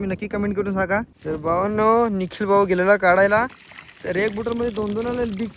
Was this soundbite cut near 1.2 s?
yes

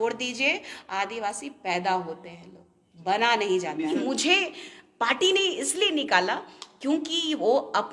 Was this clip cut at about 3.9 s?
yes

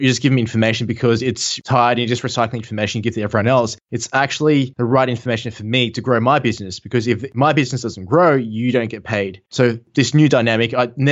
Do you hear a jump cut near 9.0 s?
no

